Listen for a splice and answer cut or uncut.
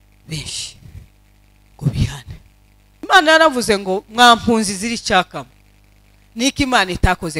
cut